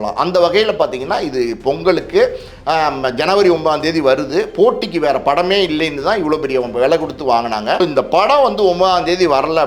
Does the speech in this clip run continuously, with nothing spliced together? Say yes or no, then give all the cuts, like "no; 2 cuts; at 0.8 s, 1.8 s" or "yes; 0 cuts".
no; 1 cut; at 7.8 s